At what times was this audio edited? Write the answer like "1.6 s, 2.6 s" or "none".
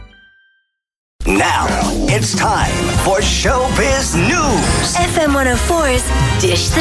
1.2 s